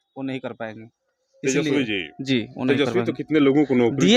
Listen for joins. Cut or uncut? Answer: uncut